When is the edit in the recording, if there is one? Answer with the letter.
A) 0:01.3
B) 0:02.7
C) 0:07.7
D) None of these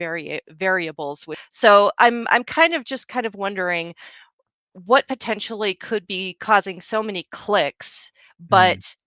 A